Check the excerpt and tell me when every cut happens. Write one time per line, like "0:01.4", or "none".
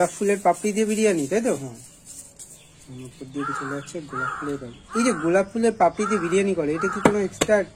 none